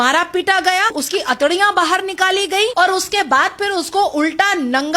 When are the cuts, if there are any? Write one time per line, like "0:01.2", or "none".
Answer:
0:01.0
0:02.7